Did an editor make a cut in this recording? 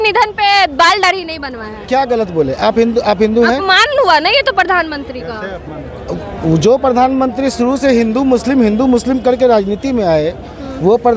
no; 0 cuts

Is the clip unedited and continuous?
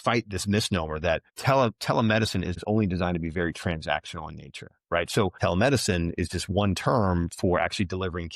no; 3 cuts; at 1.3 s, 2.6 s, 5.4 s

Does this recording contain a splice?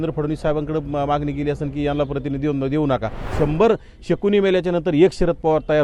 yes; 1 cut; at 3.2 s

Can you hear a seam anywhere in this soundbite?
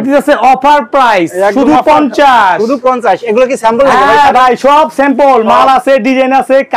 no; 0 cuts

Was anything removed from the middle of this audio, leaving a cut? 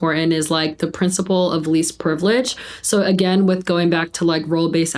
no; 0 cuts

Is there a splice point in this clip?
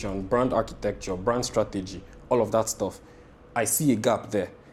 no; 0 cuts

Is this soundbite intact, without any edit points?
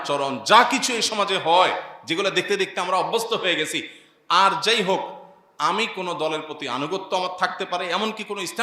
yes; 0 cuts

